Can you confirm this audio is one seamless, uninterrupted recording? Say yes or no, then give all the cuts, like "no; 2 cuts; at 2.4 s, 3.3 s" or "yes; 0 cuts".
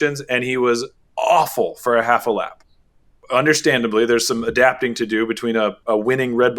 no; 2 cuts; at 1.0 s, 3.0 s